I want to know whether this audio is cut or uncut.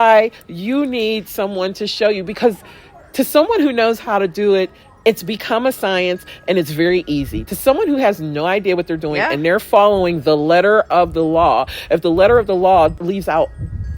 cut